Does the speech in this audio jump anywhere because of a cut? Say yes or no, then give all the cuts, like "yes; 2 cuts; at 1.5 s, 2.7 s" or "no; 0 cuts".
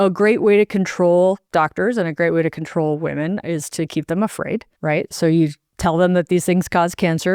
yes; 2 cuts; at 1.4 s, 4.7 s